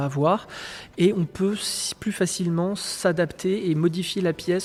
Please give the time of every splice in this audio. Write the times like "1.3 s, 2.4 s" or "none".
none